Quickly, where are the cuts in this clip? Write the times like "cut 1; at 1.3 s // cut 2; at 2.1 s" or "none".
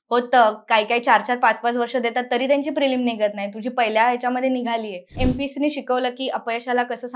cut 1; at 5.1 s